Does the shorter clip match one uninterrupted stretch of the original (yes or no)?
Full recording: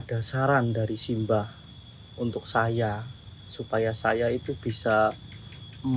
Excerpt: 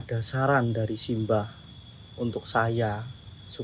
yes